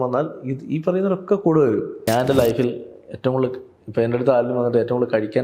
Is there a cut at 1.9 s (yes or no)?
yes